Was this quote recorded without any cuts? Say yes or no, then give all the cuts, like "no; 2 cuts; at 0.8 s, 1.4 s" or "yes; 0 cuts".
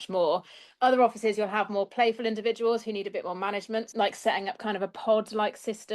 no; 1 cut; at 3.9 s